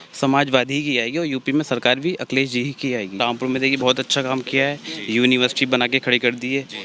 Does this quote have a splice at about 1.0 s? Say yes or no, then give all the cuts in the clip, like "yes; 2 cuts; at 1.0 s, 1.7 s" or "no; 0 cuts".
no; 1 cut; at 3.2 s